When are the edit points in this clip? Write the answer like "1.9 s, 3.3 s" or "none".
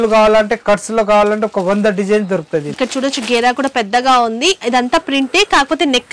2.7 s